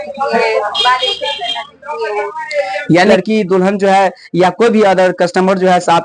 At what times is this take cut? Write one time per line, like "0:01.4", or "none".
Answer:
0:03.1